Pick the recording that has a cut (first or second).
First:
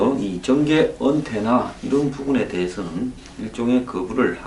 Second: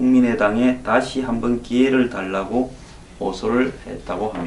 second